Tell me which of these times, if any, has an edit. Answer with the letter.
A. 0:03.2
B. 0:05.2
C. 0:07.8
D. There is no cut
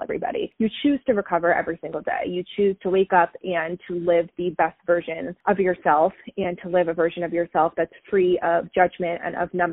B